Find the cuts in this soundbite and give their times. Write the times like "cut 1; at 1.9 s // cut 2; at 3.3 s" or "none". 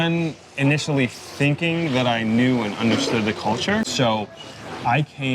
cut 1; at 3.9 s